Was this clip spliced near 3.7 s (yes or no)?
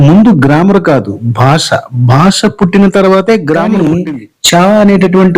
yes